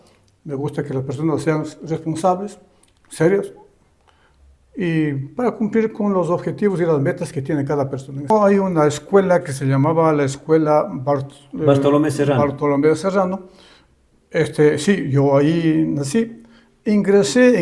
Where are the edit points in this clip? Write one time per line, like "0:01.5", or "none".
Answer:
0:08.3